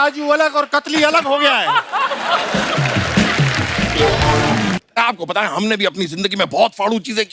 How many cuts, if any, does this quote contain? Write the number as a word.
one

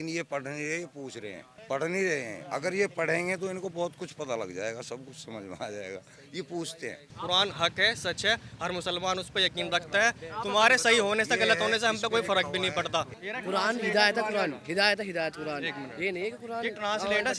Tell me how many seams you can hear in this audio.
three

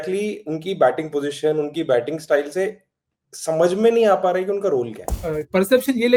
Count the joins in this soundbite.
one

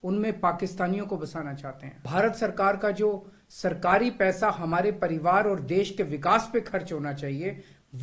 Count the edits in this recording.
one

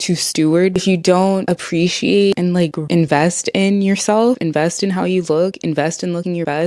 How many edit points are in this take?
two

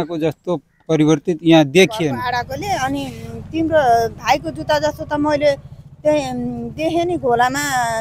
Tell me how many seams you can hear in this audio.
one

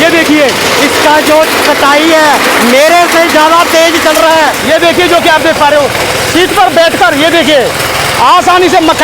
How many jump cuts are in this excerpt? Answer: one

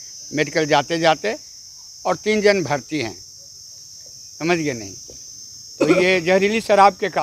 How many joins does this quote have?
zero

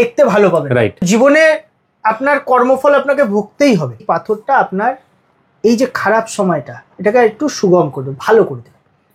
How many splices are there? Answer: two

